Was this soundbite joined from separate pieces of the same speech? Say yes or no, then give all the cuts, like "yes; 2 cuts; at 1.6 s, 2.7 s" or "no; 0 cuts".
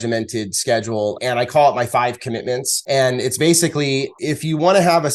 yes; 3 cuts; at 1.2 s, 2.7 s, 4.1 s